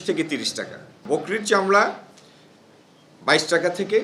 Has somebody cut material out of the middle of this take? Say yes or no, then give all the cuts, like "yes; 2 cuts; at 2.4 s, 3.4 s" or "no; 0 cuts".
yes; 1 cut; at 1.0 s